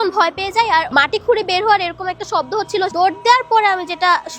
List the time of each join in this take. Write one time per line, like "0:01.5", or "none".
0:00.9
0:02.9